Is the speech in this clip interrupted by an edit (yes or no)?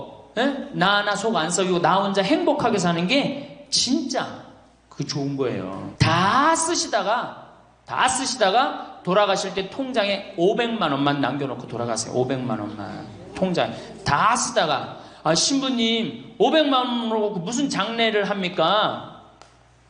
yes